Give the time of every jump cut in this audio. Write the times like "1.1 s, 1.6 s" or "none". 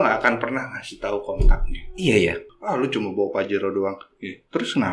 2.5 s